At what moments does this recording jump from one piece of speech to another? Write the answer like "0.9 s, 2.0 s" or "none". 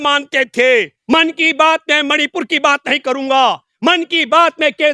1.0 s